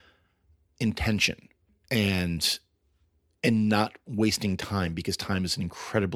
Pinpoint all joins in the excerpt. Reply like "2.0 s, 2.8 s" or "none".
1.7 s